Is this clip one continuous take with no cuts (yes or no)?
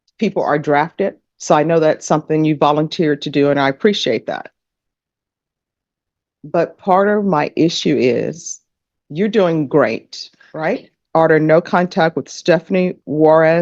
no